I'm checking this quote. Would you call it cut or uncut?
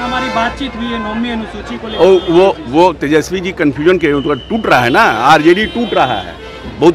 uncut